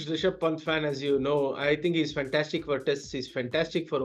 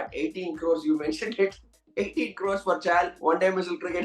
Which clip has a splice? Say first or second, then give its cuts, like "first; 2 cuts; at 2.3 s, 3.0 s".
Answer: second; 1 cut; at 3.1 s